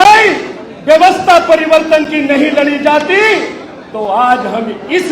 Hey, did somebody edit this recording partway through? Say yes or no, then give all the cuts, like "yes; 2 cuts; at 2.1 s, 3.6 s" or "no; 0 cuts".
no; 0 cuts